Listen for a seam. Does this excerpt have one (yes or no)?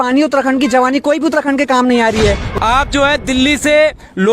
yes